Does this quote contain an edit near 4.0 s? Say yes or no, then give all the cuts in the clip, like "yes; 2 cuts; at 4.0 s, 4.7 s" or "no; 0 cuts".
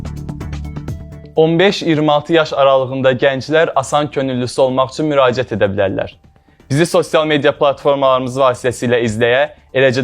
no; 1 cut; at 1.3 s